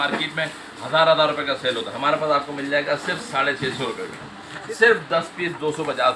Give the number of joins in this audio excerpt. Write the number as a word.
one